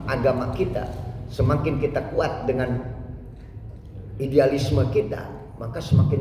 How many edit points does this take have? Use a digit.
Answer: 0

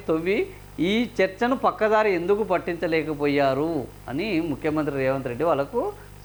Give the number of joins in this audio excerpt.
0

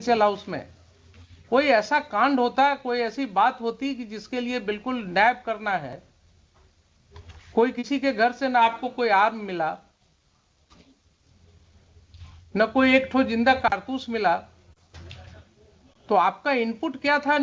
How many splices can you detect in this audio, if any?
0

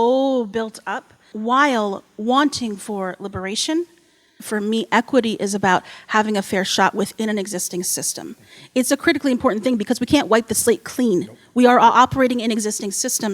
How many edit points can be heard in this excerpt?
2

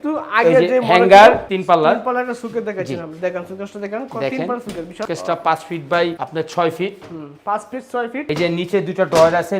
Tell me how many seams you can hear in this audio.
2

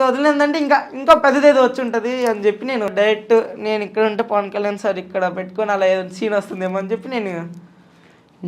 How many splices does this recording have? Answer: 1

